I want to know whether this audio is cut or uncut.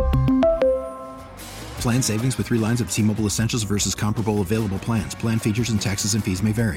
uncut